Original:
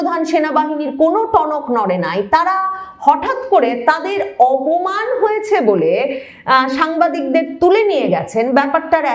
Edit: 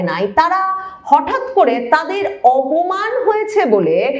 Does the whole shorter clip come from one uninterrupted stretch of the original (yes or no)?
yes